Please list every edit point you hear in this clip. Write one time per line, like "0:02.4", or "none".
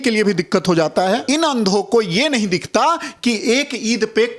0:01.2

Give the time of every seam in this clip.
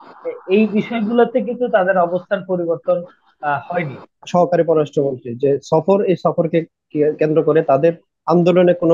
0:04.2

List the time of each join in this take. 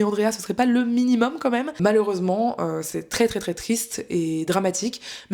0:01.8

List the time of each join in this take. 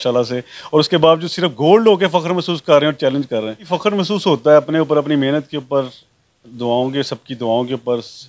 0:03.7

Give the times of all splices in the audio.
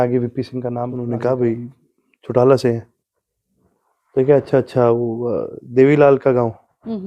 0:00.9

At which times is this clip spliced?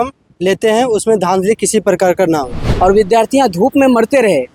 0:02.6

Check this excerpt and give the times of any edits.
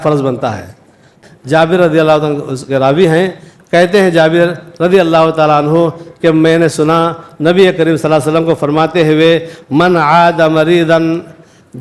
0:01.2

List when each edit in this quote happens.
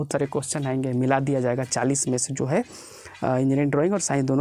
none

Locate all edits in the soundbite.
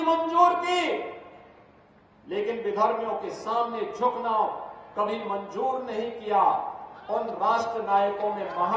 none

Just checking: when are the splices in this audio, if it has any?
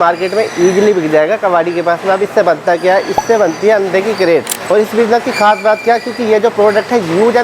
0:04.6

